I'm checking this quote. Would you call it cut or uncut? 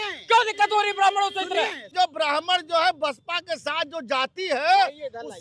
cut